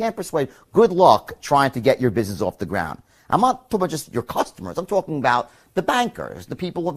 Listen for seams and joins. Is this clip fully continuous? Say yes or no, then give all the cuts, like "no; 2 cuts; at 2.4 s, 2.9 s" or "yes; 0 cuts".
yes; 0 cuts